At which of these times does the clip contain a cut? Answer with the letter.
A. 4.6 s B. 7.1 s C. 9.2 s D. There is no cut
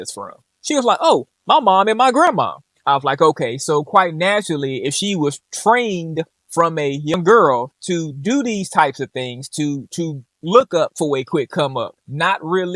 B